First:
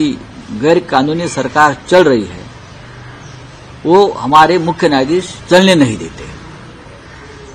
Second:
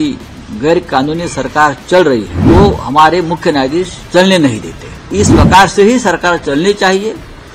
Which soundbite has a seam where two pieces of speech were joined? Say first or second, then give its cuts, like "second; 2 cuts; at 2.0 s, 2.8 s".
second; 2 cuts; at 2.3 s, 5.1 s